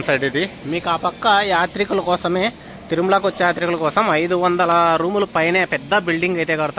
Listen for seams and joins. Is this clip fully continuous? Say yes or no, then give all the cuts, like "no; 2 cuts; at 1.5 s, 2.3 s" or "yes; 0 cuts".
yes; 0 cuts